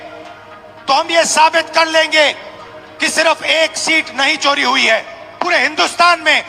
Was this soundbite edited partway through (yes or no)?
yes